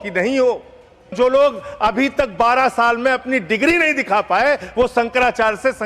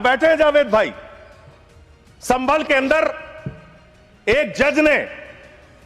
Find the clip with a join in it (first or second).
first